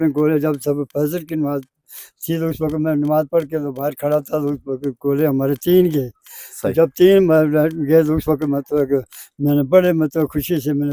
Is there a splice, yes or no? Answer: no